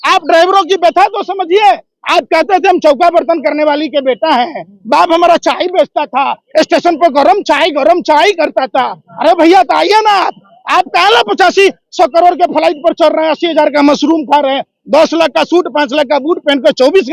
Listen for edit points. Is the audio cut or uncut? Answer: uncut